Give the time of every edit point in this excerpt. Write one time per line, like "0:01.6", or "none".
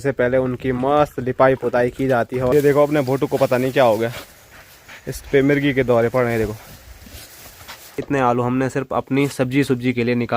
0:02.5
0:08.0